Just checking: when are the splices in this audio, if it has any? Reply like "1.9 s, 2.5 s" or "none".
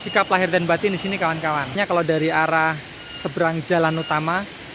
1.8 s